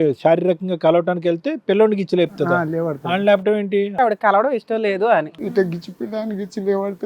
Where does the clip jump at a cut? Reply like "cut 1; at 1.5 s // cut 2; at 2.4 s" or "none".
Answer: cut 1; at 3.9 s // cut 2; at 5.3 s